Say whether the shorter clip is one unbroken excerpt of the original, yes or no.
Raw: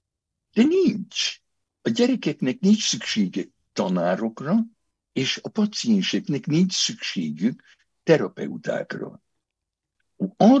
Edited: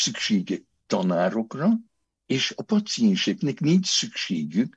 yes